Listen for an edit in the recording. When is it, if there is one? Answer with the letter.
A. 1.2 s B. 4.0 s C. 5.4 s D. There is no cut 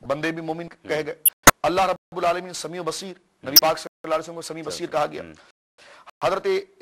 A